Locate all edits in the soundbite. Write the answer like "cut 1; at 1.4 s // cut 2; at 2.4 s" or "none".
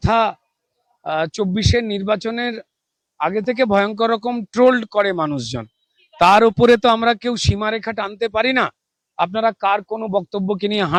none